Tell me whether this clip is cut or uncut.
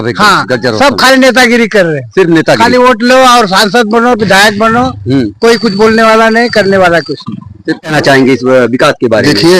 cut